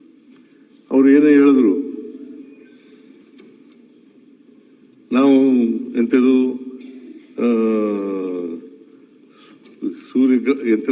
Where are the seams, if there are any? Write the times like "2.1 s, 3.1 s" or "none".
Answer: none